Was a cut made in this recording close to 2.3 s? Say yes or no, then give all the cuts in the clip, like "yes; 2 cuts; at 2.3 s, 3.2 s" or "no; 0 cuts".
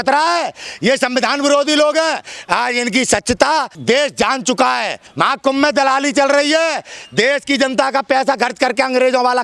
yes; 3 cuts; at 2.3 s, 3.7 s, 5.0 s